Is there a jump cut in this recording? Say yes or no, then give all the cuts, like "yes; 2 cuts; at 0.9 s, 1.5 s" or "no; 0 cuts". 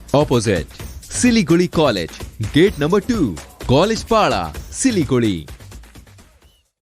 no; 0 cuts